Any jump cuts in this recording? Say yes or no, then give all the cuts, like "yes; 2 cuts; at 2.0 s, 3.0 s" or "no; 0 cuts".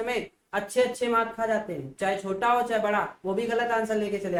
no; 0 cuts